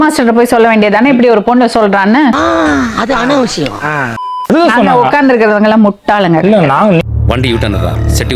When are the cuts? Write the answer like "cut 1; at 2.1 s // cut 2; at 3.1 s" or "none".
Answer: cut 1; at 4.2 s